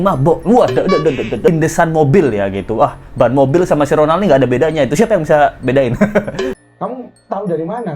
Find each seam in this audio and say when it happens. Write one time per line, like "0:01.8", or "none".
0:01.5
0:06.5